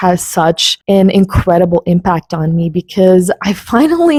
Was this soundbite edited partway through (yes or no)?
no